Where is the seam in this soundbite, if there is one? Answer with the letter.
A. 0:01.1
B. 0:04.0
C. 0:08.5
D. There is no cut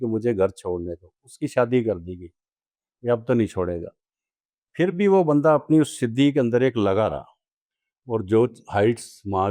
D